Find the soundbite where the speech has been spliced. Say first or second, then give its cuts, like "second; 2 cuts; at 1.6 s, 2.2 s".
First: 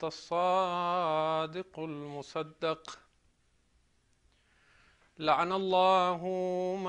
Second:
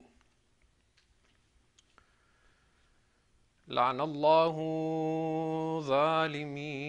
second; 1 cut; at 4.7 s